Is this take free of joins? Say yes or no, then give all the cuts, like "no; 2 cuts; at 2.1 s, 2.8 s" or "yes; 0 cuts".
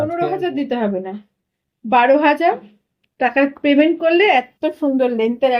yes; 0 cuts